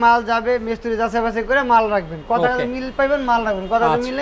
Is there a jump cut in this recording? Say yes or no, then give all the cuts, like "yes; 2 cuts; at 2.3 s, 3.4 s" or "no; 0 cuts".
no; 0 cuts